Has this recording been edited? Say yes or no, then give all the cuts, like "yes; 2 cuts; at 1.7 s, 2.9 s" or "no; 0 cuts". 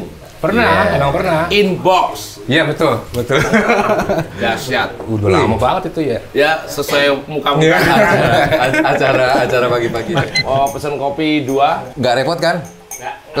yes; 3 cuts; at 6.2 s, 10.0 s, 11.9 s